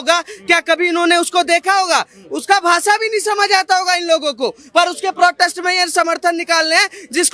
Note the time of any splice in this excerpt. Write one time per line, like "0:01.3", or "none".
none